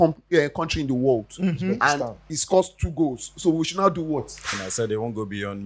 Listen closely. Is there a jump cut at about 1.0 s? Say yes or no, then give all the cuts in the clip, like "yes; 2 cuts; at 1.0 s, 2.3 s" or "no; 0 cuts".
no; 1 cut; at 4.4 s